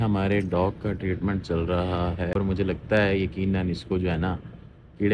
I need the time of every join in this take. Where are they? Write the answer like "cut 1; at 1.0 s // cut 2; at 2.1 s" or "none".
cut 1; at 2.3 s

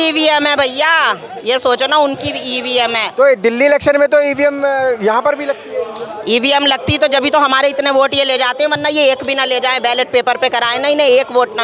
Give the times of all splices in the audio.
none

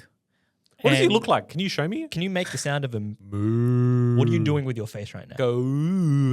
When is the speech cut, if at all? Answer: cut 1; at 2.1 s // cut 2; at 5.3 s

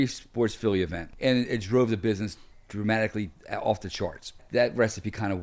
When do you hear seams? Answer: cut 1; at 1.0 s // cut 2; at 4.4 s

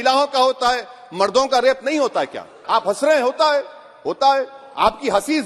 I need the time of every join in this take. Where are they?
cut 1; at 2.6 s

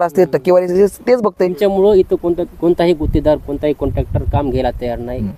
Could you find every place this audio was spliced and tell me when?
cut 1; at 1.5 s

